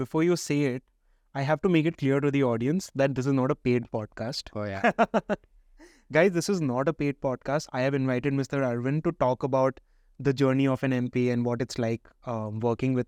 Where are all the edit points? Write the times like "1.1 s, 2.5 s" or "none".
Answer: none